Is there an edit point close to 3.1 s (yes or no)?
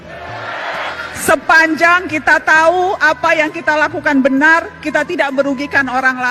no